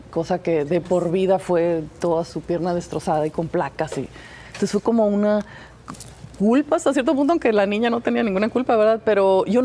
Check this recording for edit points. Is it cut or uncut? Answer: uncut